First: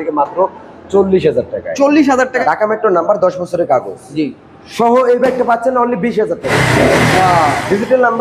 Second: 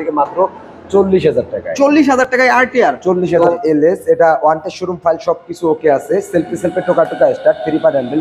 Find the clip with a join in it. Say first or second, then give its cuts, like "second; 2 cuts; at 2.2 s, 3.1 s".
first; 2 cuts; at 2.3 s, 6.5 s